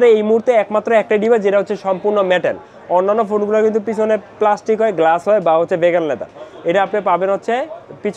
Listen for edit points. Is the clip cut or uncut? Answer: uncut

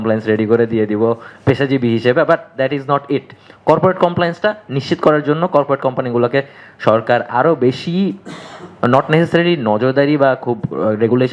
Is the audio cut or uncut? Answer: uncut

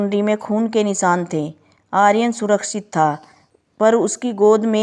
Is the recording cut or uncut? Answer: uncut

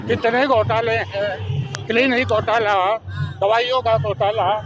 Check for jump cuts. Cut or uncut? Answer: uncut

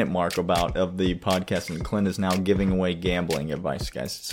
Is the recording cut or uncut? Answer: uncut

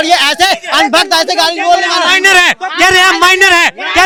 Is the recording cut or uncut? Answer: uncut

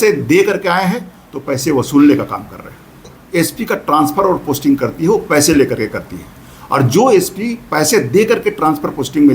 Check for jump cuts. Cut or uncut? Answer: cut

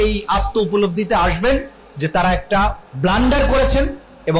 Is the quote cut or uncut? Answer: cut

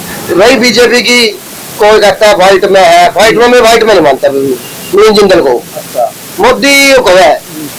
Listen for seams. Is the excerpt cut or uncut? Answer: uncut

